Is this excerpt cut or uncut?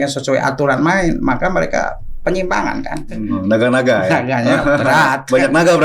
cut